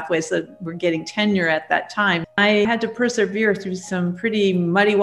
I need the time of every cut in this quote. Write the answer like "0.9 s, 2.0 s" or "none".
2.4 s

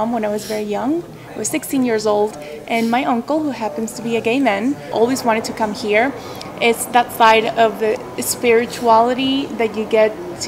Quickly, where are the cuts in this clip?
4.9 s

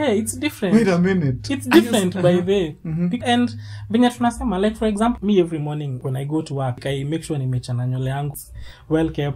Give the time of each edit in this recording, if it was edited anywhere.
3.2 s, 5.2 s, 5.9 s, 6.8 s, 8.4 s

